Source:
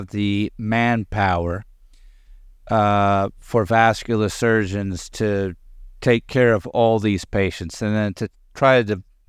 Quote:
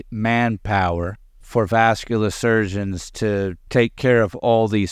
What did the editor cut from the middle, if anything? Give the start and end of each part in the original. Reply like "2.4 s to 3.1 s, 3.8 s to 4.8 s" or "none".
1.9 s to 3.4 s, 5.6 s to 5.9 s